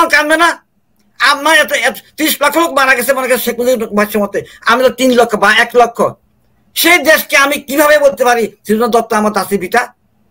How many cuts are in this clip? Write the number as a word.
zero